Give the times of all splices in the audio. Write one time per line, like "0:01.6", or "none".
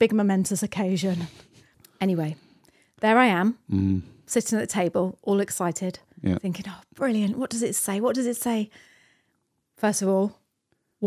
0:01.7